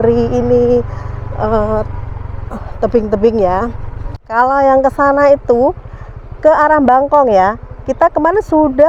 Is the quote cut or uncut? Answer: cut